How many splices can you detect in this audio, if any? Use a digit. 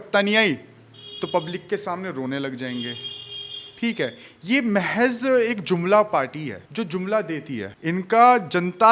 2